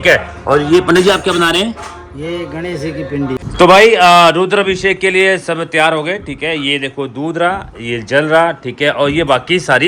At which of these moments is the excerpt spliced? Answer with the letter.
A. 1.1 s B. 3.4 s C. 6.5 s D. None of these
B